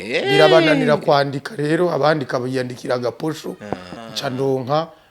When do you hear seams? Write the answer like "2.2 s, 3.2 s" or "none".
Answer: 3.9 s